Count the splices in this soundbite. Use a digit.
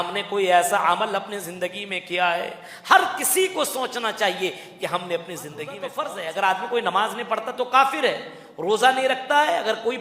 1